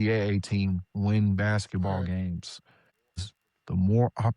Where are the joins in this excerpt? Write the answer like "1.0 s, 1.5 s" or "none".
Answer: 3.2 s